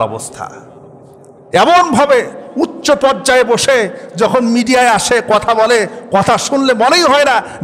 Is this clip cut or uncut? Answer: uncut